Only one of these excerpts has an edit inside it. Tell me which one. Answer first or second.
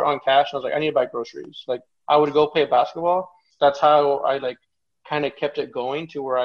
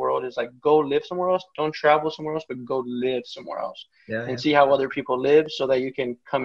first